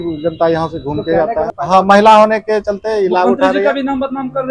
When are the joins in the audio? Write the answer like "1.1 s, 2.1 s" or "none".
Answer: 1.5 s